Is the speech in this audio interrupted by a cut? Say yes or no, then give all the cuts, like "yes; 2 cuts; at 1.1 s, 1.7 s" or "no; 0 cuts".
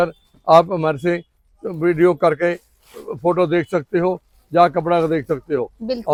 no; 0 cuts